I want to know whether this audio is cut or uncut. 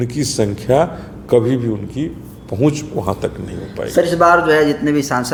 uncut